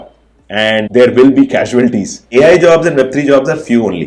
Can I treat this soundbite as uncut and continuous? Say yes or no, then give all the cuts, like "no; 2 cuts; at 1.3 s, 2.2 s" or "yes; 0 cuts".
no; 2 cuts; at 0.8 s, 2.1 s